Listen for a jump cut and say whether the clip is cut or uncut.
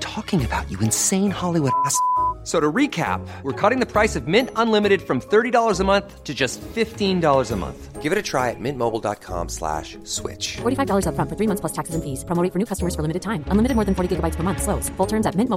uncut